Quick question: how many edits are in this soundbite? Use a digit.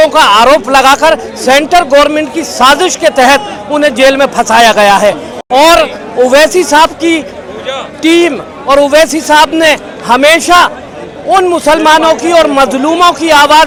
0